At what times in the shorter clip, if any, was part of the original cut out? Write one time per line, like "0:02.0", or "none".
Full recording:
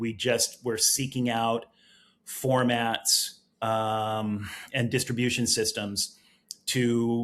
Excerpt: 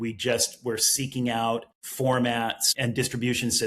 0:01.8
0:02.7